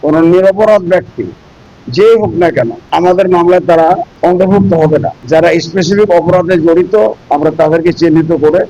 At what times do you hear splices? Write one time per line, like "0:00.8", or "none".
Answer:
0:02.8
0:04.1
0:05.2
0:07.2

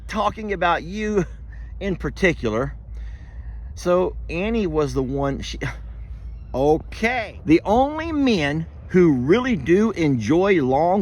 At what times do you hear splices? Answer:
0:07.2

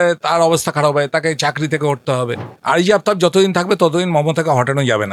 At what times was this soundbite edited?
0:02.7

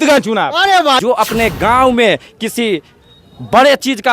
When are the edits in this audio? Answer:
0:01.0

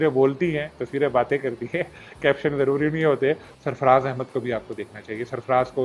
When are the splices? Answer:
0:03.5

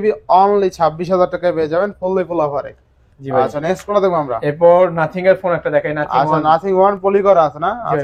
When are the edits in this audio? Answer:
none

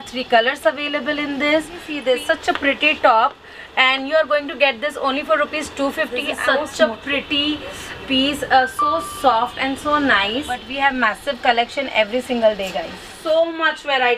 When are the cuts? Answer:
0:01.9
0:06.3
0:10.7
0:13.1

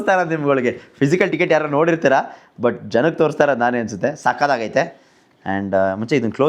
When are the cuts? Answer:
none

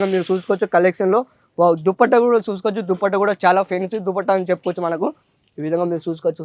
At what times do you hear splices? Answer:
none

